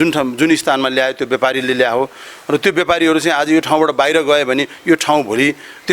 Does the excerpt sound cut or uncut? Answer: uncut